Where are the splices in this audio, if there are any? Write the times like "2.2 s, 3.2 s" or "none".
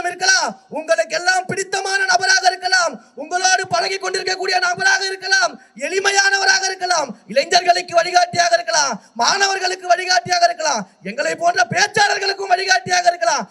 none